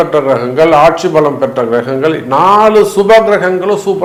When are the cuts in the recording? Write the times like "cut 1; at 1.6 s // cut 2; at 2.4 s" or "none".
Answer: none